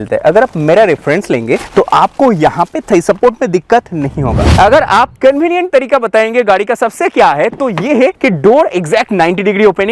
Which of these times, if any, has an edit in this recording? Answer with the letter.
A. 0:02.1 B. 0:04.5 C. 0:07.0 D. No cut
B